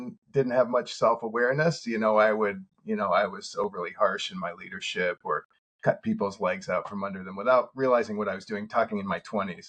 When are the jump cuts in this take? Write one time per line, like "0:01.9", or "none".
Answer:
none